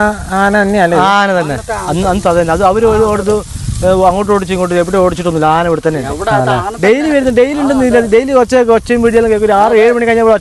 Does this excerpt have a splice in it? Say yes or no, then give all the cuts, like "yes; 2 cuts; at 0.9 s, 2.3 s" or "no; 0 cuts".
no; 0 cuts